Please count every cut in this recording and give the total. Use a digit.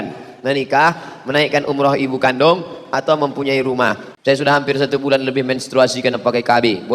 1